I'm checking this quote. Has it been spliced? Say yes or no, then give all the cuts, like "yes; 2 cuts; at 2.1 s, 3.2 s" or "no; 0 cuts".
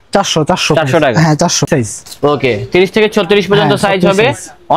yes; 1 cut; at 1.7 s